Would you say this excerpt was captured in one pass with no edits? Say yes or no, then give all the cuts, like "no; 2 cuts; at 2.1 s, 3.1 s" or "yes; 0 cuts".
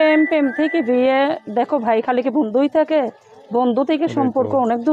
yes; 0 cuts